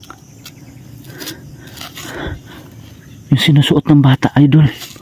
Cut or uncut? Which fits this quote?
uncut